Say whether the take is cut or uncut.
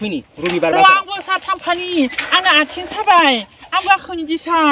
uncut